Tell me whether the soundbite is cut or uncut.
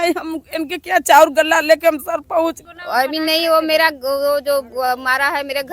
cut